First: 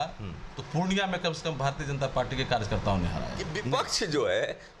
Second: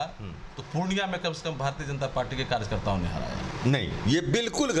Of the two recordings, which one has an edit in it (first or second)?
first